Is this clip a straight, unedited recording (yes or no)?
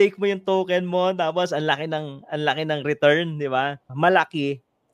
no